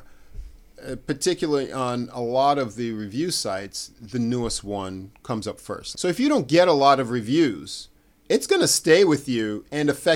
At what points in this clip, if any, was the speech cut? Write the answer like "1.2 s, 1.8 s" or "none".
5.9 s